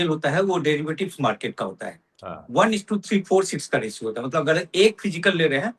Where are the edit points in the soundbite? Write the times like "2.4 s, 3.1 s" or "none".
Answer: none